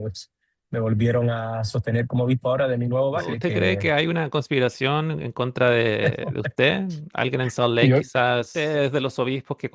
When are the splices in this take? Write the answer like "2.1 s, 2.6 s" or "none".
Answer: 3.3 s, 8.5 s